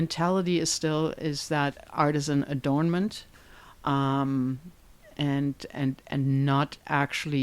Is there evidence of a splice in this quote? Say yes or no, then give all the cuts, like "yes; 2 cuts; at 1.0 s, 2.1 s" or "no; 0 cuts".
yes; 1 cut; at 1.7 s